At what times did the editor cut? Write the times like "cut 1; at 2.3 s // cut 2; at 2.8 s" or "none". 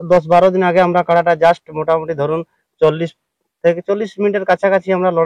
none